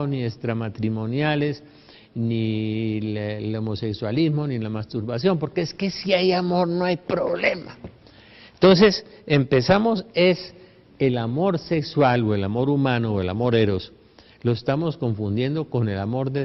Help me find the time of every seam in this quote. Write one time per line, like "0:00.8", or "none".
0:15.5